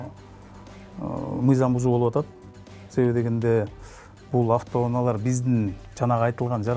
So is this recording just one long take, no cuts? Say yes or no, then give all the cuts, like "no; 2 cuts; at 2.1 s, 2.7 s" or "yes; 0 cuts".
yes; 0 cuts